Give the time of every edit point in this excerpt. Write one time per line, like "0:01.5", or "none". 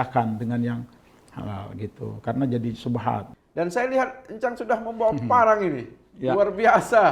0:03.4

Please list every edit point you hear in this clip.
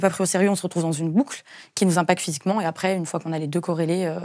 none

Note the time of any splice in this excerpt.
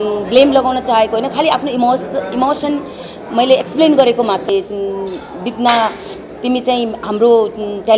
0:04.5

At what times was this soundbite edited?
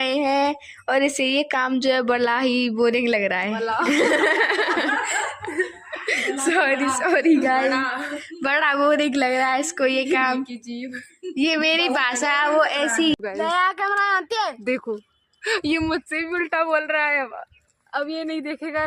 0:13.2

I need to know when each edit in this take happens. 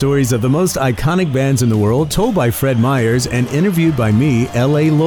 none

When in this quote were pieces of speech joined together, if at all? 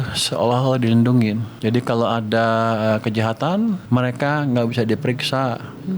0:01.5
0:03.8

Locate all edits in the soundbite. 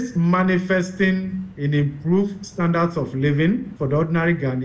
0:03.7

